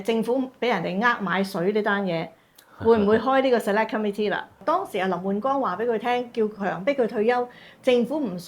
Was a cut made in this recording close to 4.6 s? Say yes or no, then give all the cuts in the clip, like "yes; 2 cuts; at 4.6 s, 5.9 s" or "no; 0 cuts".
yes; 1 cut; at 4.6 s